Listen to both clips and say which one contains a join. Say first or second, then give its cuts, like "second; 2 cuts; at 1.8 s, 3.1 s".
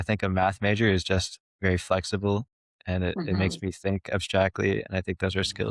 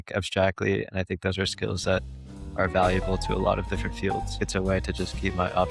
second; 1 cut; at 4.4 s